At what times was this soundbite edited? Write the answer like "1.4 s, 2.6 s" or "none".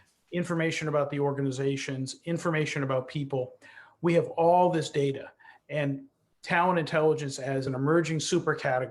7.7 s